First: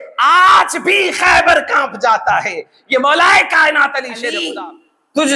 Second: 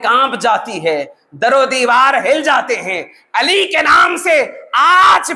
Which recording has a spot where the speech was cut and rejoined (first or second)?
first